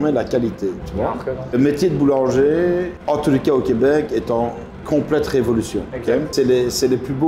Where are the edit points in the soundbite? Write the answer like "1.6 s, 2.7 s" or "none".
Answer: 1.5 s, 2.9 s, 6.3 s